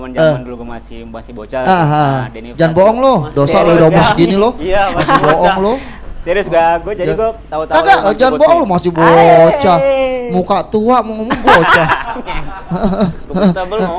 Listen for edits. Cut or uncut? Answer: uncut